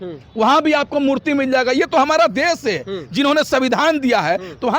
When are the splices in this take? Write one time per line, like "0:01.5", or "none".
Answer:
none